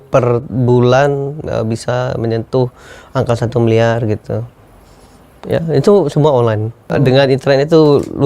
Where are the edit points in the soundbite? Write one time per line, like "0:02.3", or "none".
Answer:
0:06.9